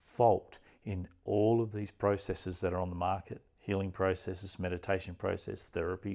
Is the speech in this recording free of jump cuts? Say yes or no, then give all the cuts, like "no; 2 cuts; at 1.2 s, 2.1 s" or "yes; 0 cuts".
yes; 0 cuts